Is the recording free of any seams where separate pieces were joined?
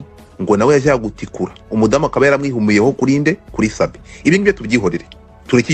yes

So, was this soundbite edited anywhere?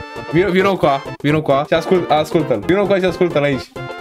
yes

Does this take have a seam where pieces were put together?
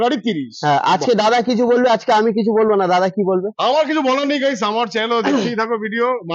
no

